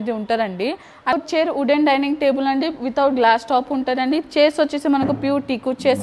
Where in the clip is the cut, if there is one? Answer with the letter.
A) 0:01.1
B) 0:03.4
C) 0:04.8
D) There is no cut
A